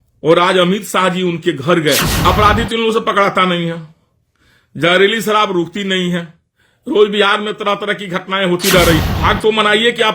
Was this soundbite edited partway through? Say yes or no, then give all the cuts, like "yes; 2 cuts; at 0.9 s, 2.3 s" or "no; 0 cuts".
yes; 2 cuts; at 2.1 s, 9.0 s